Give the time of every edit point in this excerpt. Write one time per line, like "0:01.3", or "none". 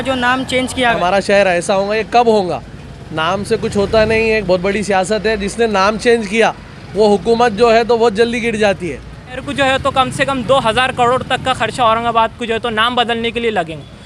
0:01.0
0:09.4